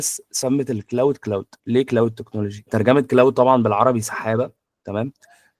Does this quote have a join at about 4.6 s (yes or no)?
no